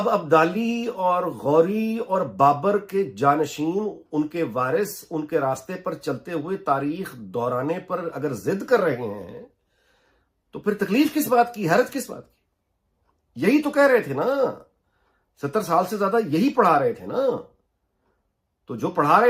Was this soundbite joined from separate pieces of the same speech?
no; 0 cuts

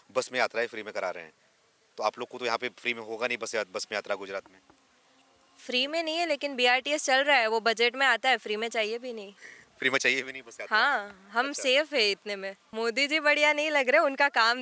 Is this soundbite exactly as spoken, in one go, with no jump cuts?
no; 1 cut; at 12.6 s

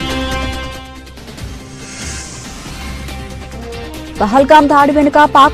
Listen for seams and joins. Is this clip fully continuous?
no; 1 cut; at 1.9 s

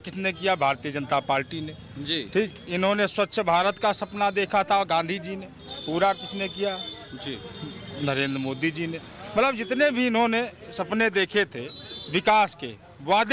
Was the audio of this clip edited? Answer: no; 0 cuts

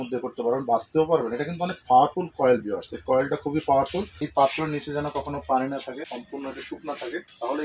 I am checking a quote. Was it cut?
yes; 2 cuts; at 4.1 s, 6.1 s

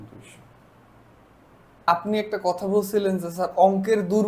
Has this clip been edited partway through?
yes; 1 cut; at 1.9 s

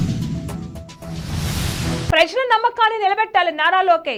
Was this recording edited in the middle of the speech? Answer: no; 0 cuts

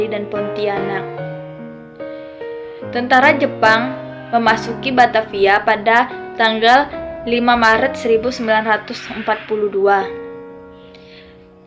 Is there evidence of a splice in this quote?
yes; 2 cuts; at 1.0 s, 2.4 s

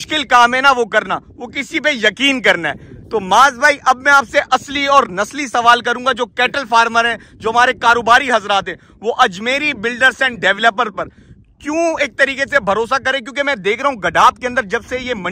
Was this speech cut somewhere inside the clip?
no; 0 cuts

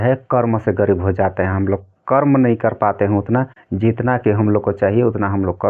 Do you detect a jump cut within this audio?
no; 0 cuts

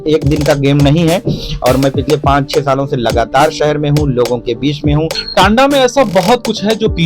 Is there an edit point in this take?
yes; 1 cut; at 5.1 s

